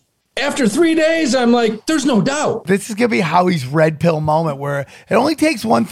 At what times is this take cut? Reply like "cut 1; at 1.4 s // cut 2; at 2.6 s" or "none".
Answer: cut 1; at 2.6 s